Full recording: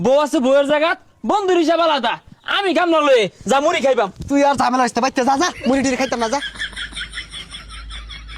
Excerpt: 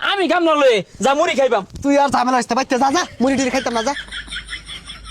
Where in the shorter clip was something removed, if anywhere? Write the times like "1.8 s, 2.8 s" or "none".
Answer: 4.0 s